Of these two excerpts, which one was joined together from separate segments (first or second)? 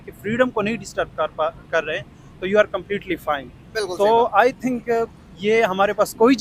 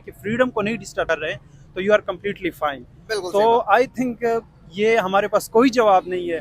second